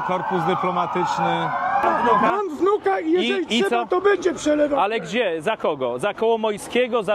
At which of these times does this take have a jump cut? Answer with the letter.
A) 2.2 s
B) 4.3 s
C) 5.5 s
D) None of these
A